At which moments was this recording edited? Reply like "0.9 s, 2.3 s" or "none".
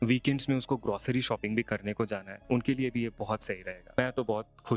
2.3 s, 3.9 s